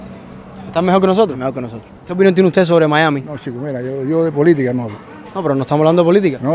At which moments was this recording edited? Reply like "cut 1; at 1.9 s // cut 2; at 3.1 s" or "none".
cut 1; at 2.0 s